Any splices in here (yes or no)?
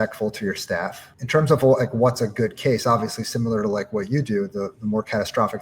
yes